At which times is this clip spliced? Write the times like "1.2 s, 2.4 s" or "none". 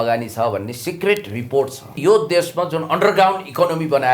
1.9 s

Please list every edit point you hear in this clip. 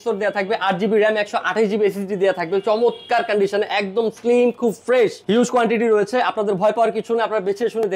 5.2 s

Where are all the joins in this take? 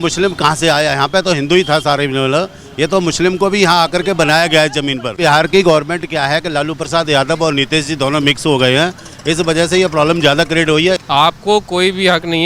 5.2 s, 11.0 s

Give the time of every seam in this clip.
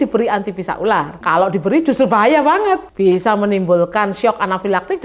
1.2 s, 2.9 s

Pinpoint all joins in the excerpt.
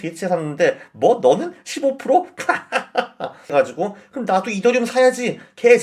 3.5 s

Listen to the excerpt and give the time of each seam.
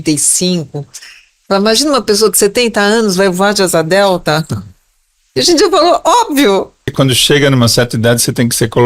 6.9 s

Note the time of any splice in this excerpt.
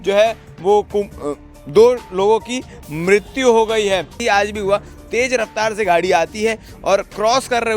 4.2 s

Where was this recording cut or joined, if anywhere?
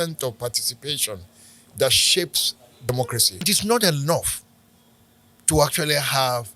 3.4 s

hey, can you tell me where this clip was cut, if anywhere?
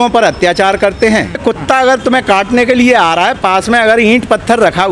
1.4 s

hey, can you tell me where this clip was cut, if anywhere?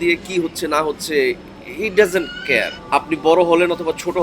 2.8 s

